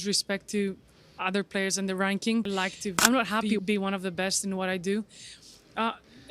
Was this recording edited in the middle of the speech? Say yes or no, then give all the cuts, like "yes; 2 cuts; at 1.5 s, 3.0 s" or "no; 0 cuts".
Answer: yes; 1 cut; at 3.6 s